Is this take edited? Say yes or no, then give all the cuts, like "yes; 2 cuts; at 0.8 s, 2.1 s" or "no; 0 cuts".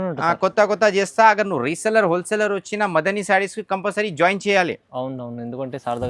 no; 0 cuts